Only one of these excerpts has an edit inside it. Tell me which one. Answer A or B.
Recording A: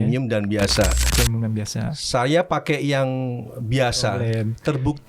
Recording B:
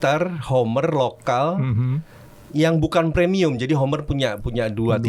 A